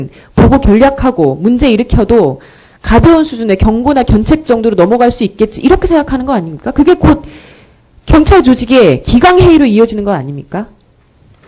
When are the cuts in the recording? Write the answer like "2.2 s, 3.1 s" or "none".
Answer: 1.6 s